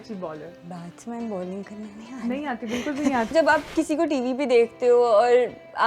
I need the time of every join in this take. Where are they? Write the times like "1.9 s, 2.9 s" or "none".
3.3 s